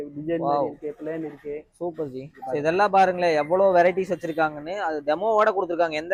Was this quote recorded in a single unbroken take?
yes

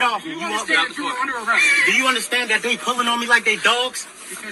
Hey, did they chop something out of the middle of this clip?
no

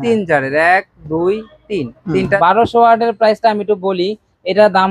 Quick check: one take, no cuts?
no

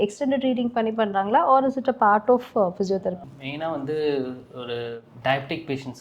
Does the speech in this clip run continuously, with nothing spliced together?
no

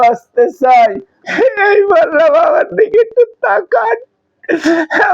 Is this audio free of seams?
no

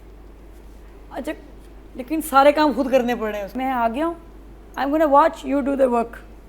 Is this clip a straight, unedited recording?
no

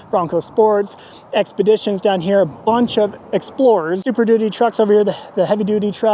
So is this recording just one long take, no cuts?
no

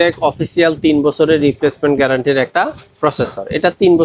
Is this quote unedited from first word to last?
yes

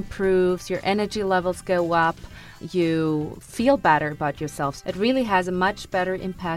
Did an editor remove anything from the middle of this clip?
yes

